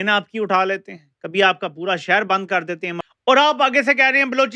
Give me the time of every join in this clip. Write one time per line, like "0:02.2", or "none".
0:03.0